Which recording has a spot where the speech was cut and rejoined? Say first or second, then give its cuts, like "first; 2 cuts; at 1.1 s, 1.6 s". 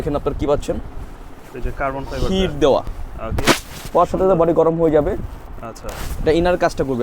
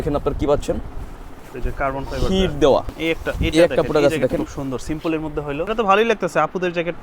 second; 2 cuts; at 2.9 s, 5.7 s